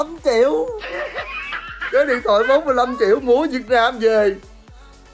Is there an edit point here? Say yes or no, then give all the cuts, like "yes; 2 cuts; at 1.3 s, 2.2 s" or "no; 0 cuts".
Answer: no; 0 cuts